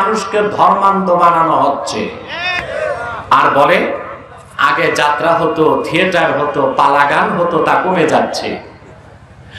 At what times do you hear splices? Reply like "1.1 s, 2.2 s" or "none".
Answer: 3.3 s